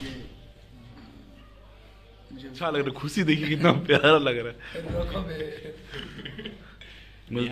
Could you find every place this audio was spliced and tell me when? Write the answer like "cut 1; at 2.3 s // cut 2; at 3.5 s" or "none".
cut 1; at 2.6 s